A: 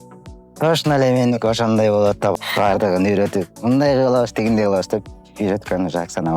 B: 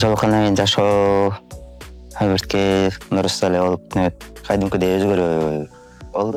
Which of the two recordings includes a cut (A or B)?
A